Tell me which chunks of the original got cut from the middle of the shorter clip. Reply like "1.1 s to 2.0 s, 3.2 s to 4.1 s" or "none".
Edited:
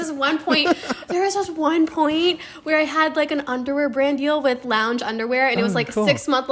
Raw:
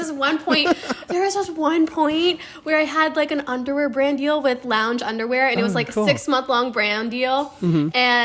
none